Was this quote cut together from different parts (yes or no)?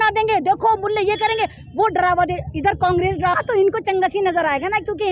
yes